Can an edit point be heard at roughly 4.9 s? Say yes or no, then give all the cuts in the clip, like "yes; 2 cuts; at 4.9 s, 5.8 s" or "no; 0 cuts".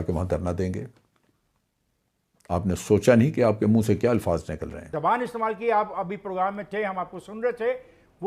yes; 1 cut; at 4.9 s